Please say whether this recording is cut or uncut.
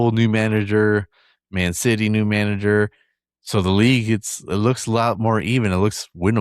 uncut